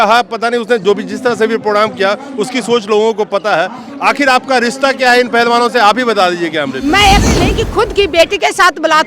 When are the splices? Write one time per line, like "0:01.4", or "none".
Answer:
0:07.2